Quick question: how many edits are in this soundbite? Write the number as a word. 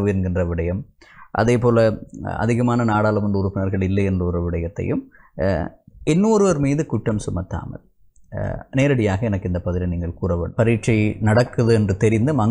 one